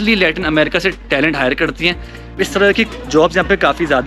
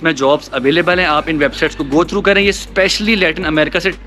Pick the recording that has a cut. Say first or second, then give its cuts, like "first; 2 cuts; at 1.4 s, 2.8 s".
first; 1 cut; at 2.3 s